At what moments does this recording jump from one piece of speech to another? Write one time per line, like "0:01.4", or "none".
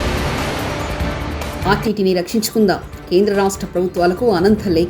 0:01.6